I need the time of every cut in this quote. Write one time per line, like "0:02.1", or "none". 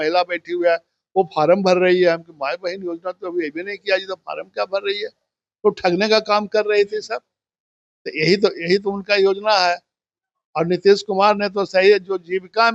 none